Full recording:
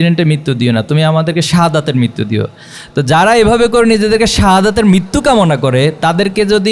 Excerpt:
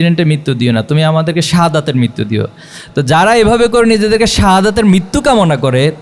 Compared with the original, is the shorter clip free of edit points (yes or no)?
yes